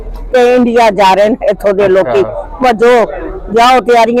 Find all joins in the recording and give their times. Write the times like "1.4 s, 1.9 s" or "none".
none